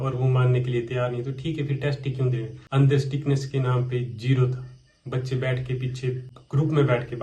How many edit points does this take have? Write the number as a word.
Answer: two